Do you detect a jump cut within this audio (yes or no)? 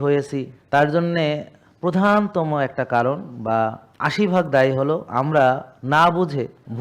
no